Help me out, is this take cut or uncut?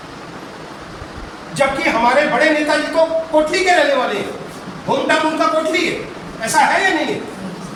uncut